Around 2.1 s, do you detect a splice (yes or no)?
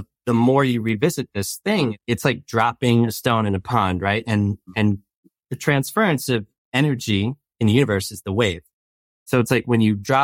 yes